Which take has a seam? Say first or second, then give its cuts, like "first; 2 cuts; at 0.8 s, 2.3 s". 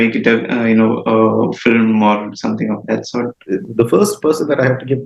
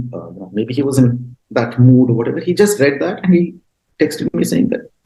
first; 1 cut; at 3.4 s